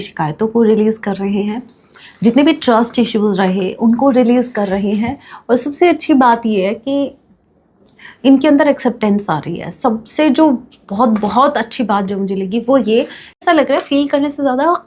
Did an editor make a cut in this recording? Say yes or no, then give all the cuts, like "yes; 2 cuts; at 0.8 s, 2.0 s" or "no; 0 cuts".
yes; 1 cut; at 13.4 s